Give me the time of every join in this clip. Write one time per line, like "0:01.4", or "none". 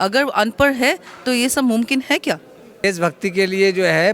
0:02.8